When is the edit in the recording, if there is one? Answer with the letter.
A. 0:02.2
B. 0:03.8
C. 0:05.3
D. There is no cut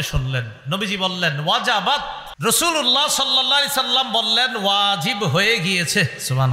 A